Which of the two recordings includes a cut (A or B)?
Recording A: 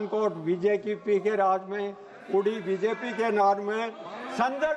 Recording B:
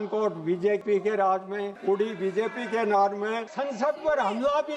B